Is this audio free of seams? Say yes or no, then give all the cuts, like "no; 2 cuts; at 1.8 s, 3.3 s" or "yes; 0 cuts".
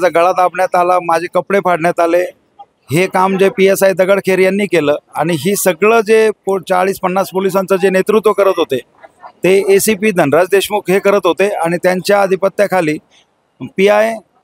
yes; 0 cuts